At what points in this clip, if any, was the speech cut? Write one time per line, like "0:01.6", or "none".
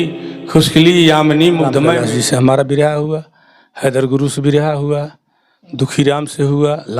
0:02.0